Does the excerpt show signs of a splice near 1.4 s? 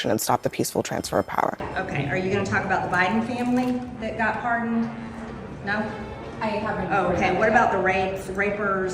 yes; 1 cut; at 1.4 s

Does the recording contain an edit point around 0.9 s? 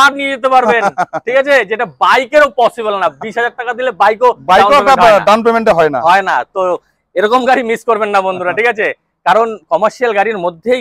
no; 0 cuts

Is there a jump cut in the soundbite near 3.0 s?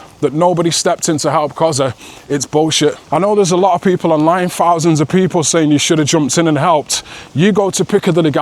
yes; 1 cut; at 3.0 s

